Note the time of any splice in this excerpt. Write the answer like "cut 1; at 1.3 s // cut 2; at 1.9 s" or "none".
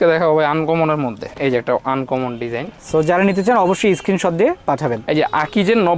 cut 1; at 1.2 s // cut 2; at 5.0 s